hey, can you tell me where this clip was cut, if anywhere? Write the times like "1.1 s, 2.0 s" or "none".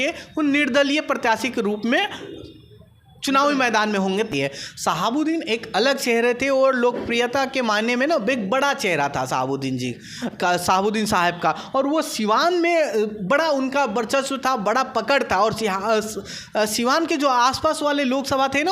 4.3 s